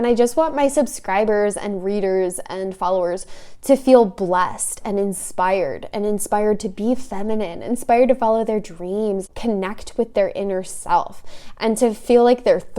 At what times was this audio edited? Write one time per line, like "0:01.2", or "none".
0:09.3